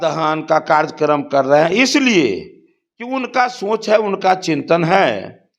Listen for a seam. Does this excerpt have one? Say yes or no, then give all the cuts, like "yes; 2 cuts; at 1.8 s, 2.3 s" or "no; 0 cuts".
no; 0 cuts